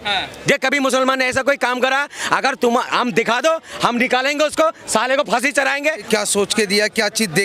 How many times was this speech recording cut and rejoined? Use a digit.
1